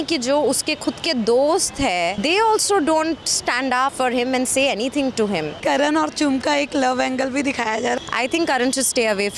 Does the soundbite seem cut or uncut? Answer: cut